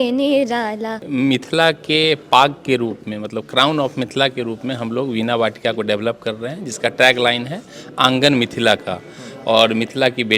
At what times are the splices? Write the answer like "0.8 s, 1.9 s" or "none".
1.0 s